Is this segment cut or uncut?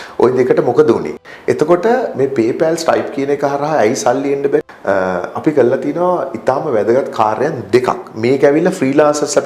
cut